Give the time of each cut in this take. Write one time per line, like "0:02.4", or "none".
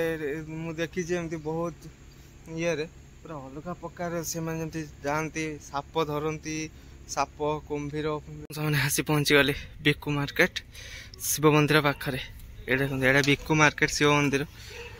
0:08.4